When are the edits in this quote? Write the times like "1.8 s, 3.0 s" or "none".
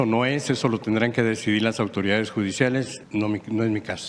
3.0 s